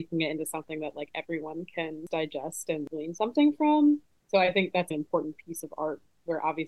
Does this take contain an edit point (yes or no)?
yes